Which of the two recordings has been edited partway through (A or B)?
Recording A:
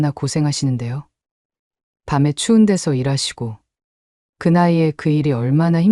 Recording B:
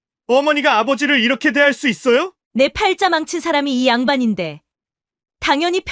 B